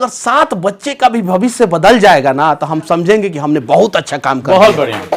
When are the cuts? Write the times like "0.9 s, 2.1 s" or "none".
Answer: none